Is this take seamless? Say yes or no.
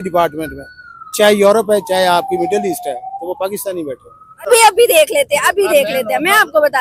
no